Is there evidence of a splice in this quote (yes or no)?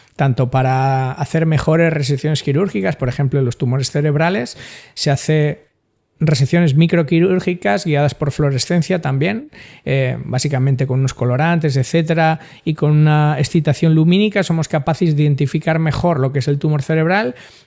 no